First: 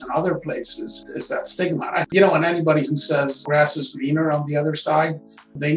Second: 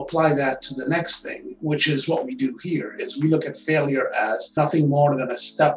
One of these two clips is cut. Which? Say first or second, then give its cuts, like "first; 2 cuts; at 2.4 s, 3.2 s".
first; 3 cuts; at 1.0 s, 2.1 s, 3.4 s